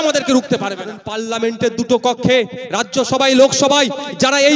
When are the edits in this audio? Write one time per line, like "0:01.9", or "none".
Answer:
0:01.1